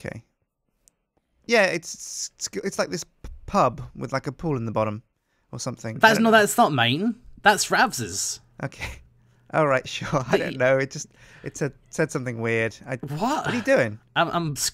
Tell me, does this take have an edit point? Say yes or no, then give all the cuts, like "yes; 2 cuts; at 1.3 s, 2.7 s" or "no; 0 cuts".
no; 0 cuts